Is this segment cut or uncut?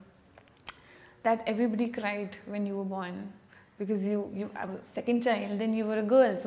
uncut